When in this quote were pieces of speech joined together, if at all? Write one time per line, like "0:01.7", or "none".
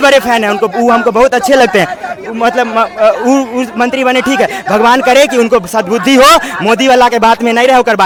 none